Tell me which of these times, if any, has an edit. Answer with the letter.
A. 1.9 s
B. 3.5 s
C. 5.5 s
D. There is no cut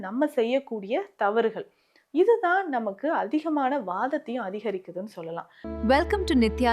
C